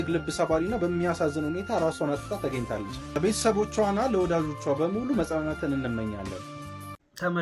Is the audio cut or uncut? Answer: uncut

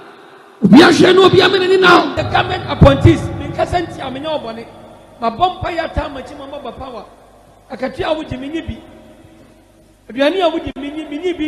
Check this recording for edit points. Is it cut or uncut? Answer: cut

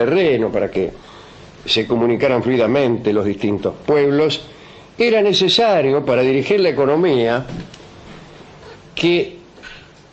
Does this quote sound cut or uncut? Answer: uncut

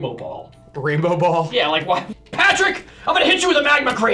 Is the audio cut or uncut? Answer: cut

